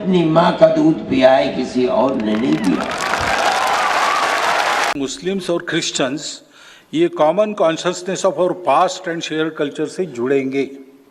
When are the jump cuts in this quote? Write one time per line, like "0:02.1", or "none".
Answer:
0:04.9